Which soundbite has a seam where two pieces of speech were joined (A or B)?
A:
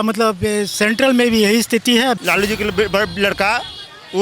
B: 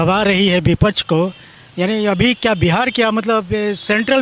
A